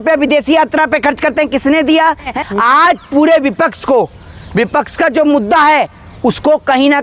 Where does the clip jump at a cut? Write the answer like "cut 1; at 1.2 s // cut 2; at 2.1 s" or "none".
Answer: cut 1; at 2.4 s